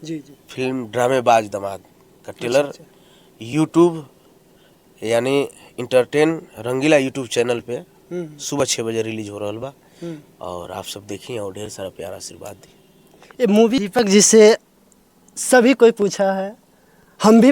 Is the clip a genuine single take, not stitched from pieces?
no; 1 cut; at 13.8 s

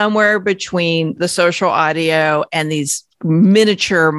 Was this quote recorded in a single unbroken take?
yes; 0 cuts

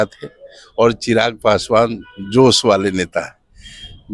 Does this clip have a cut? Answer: no; 0 cuts

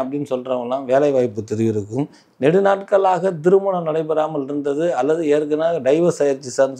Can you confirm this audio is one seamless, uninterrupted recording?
yes; 0 cuts

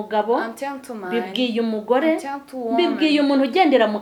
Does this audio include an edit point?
no; 0 cuts

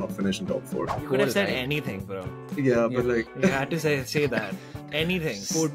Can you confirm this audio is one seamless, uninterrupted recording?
no; 1 cut; at 1.0 s

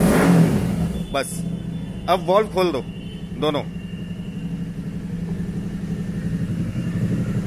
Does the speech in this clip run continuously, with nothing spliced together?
yes; 0 cuts

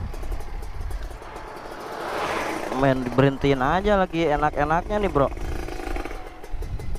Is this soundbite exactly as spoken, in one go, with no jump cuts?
no; 1 cut; at 1.2 s

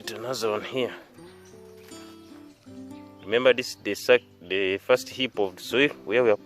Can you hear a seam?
yes; 2 cuts; at 0.9 s, 3.2 s

